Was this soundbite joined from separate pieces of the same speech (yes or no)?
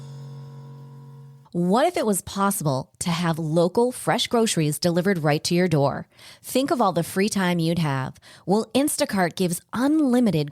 yes